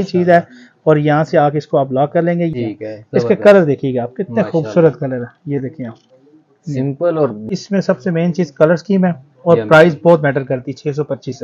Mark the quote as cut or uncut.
cut